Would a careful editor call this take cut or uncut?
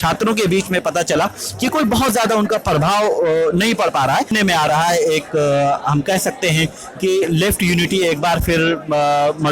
cut